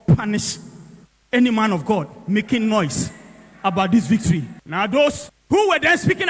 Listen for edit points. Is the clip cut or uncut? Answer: cut